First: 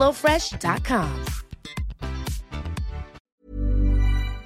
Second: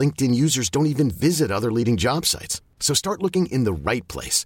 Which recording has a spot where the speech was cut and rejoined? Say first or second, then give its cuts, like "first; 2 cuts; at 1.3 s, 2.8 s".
first; 1 cut; at 3.4 s